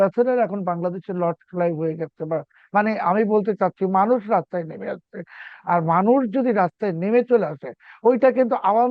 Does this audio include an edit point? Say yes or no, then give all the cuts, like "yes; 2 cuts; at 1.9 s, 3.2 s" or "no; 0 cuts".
yes; 1 cut; at 2.6 s